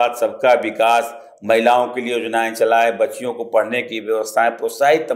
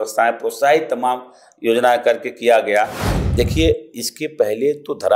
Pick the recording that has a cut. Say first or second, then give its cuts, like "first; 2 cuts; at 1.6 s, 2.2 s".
second; 1 cut; at 3.0 s